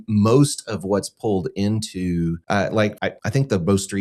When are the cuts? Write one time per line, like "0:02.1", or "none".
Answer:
0:02.4
0:03.1